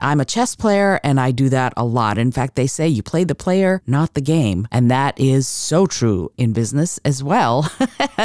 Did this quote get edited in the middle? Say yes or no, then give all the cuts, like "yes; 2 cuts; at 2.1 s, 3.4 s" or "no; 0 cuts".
yes; 2 cuts; at 4.2 s, 6.4 s